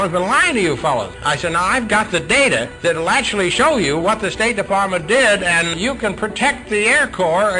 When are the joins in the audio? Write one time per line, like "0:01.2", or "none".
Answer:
0:01.2
0:02.7
0:05.7